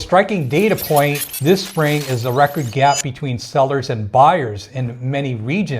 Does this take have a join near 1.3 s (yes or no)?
yes